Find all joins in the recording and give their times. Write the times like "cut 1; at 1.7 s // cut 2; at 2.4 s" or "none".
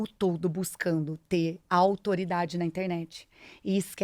none